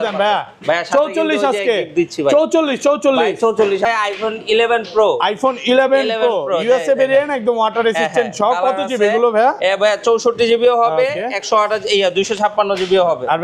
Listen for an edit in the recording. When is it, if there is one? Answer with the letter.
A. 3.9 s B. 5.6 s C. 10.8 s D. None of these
A